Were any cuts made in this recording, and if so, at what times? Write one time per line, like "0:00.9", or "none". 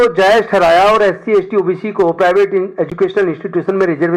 none